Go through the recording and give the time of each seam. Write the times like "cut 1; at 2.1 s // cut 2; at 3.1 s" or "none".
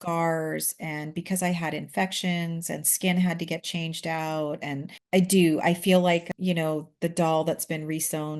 cut 1; at 6.3 s